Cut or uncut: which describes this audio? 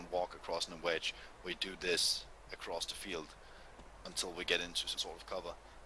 uncut